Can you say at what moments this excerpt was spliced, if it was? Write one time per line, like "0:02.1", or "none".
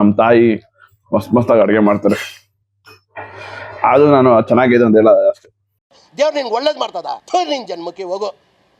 none